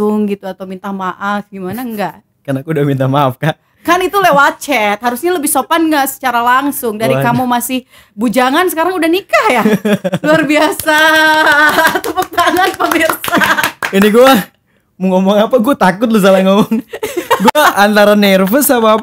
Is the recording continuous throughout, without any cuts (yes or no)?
yes